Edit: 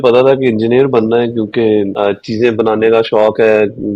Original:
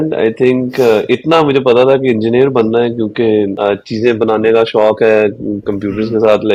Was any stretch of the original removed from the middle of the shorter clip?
no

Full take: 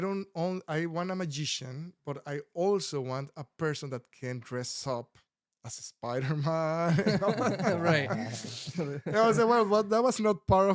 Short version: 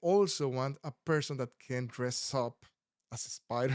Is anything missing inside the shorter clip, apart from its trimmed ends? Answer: no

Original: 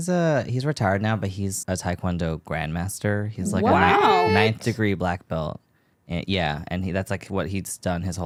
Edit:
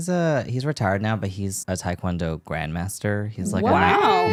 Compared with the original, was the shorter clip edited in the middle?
no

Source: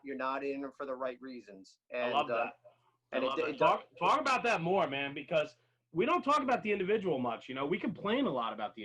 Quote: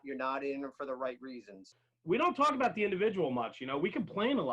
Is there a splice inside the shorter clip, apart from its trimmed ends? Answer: yes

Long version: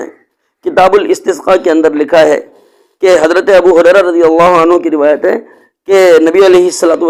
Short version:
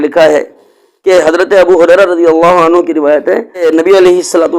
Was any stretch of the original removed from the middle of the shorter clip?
yes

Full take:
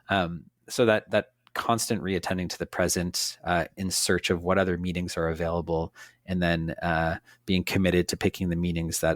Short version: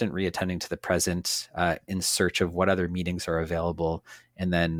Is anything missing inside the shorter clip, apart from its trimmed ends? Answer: no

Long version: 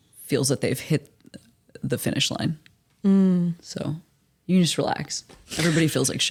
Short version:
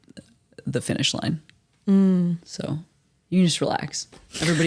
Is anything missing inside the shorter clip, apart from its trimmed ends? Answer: no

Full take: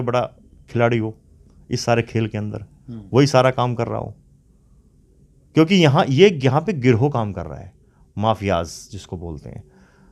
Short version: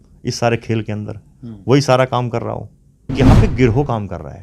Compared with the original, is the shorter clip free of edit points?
no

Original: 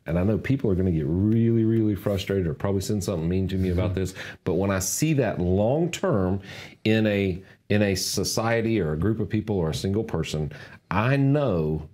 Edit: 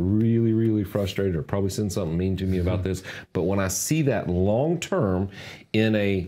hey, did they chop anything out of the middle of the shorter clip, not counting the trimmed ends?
no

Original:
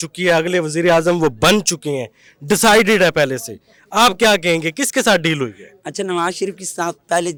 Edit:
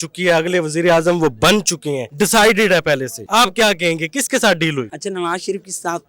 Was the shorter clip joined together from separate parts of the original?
yes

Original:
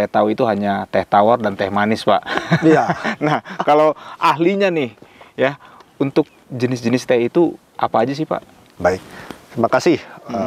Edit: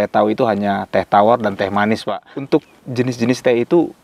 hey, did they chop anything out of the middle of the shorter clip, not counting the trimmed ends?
yes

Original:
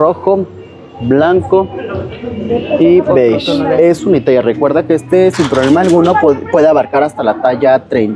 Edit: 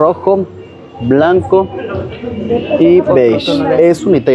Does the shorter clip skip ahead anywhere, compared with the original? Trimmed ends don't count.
no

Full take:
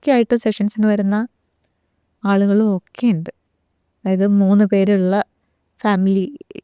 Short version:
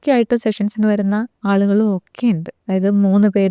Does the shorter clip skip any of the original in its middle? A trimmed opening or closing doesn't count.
yes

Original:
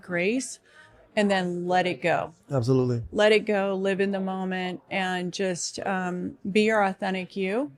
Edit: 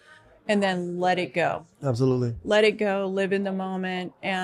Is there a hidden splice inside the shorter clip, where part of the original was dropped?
no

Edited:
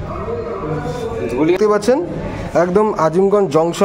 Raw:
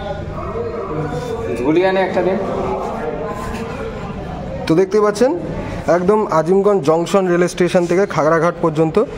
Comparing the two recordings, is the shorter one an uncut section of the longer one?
no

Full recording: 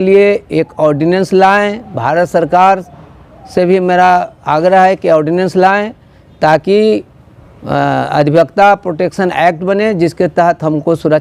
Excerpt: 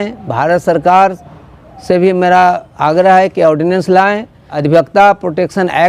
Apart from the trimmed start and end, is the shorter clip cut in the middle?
yes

